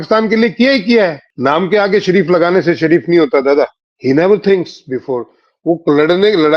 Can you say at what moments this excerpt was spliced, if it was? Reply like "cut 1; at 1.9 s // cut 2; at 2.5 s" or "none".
cut 1; at 1.3 s // cut 2; at 3.9 s